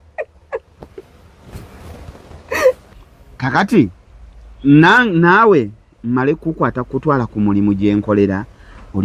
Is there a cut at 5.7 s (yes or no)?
no